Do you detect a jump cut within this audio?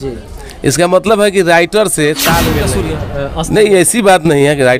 yes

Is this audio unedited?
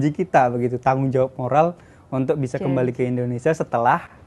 yes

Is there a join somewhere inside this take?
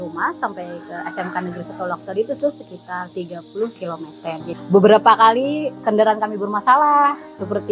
yes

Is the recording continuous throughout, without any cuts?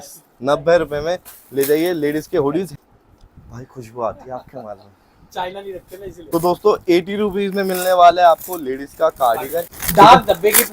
no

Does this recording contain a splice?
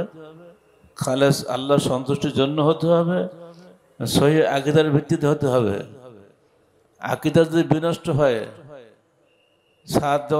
no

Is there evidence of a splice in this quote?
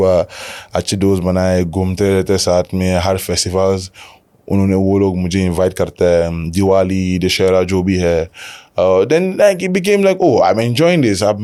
no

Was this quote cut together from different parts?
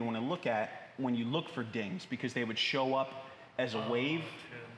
no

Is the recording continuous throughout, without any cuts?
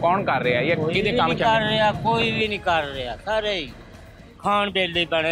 yes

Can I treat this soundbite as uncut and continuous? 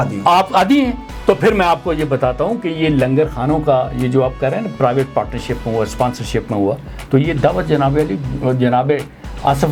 yes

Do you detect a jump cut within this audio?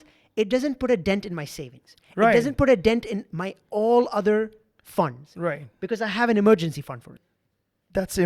yes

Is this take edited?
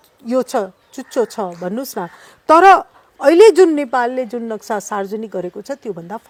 no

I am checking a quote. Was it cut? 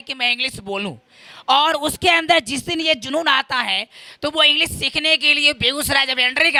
no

